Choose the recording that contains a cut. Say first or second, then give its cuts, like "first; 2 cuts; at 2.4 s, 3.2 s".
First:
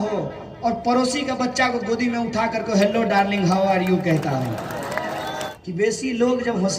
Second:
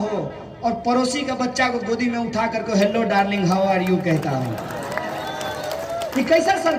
first; 1 cut; at 5.5 s